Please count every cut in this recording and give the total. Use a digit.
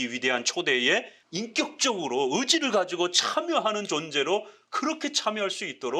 1